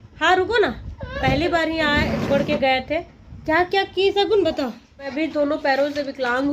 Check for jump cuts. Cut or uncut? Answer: cut